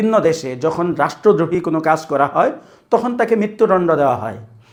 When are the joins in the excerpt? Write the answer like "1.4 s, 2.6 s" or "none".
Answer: none